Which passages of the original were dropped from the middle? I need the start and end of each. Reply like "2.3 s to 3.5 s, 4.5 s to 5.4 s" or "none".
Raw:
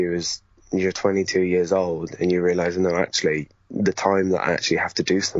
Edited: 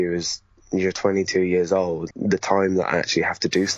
2.1 s to 3.6 s